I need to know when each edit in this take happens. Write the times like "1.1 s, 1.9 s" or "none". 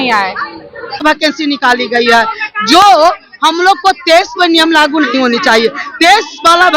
1.0 s